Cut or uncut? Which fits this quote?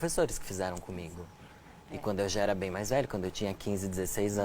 uncut